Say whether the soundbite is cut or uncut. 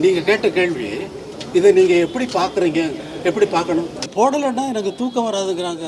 cut